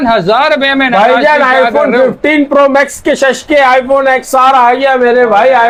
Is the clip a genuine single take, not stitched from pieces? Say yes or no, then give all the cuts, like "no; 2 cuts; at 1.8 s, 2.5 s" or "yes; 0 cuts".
yes; 0 cuts